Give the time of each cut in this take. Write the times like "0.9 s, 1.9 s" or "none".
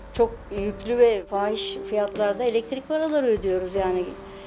1.3 s